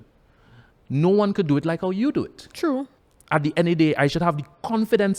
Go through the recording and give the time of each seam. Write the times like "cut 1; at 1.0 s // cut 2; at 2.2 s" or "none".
cut 1; at 2.9 s